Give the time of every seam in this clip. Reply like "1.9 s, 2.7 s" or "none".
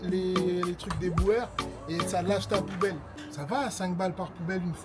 3.1 s